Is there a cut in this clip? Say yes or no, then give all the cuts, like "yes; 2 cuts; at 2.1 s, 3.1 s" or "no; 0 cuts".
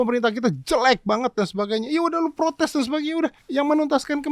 yes; 1 cut; at 3.4 s